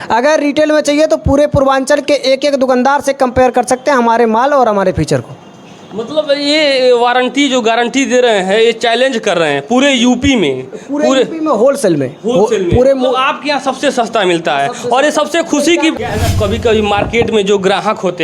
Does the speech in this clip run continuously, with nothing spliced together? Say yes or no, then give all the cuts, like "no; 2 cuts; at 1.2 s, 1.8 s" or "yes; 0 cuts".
no; 1 cut; at 16.0 s